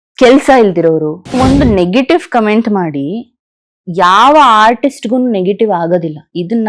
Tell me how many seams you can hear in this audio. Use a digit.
1